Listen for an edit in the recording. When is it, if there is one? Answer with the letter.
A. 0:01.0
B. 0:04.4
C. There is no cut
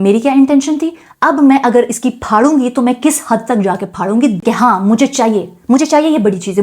B